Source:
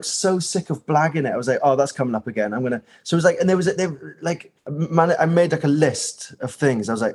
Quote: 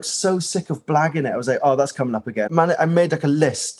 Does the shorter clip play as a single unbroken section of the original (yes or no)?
no